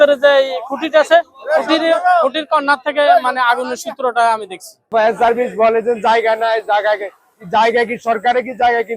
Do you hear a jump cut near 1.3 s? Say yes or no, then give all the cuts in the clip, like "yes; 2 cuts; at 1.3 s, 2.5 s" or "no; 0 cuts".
no; 1 cut; at 4.9 s